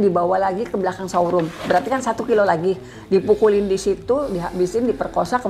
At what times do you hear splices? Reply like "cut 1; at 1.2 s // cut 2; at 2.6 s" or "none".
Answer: none